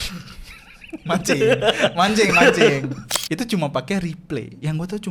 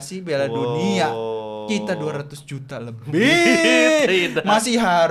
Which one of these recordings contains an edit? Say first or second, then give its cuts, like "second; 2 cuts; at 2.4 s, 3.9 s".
first; 1 cut; at 3.1 s